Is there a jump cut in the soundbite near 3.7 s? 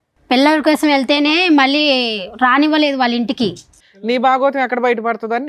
yes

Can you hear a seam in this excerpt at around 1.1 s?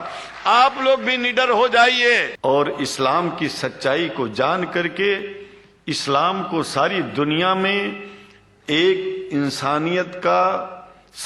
no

